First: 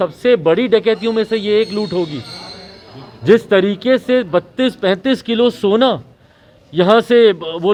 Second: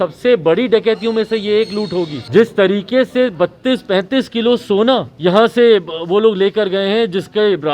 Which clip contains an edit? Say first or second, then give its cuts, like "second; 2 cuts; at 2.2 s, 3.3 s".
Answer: second; 2 cuts; at 2.2 s, 5.1 s